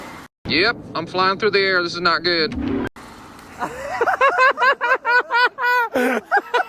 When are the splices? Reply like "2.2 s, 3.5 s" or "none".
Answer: none